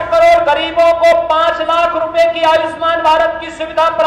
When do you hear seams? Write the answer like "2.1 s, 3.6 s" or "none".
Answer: none